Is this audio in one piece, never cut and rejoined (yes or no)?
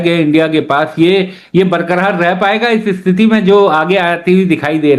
yes